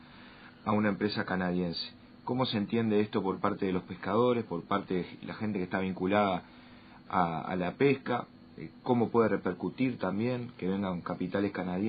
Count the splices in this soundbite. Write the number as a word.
zero